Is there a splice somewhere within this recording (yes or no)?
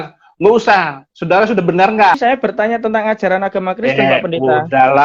yes